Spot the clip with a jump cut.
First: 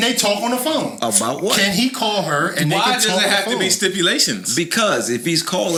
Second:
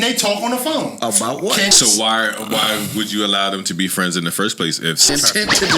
second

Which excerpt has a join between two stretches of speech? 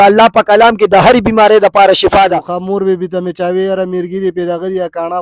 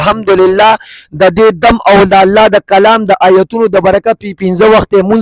first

